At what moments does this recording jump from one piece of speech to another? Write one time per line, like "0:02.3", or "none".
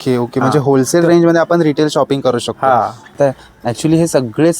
0:03.1